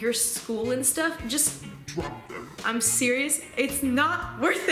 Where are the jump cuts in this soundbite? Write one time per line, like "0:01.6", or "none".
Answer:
none